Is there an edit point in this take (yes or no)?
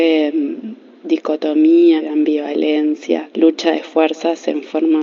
no